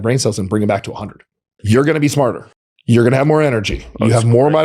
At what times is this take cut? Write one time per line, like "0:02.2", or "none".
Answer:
0:01.6
0:02.7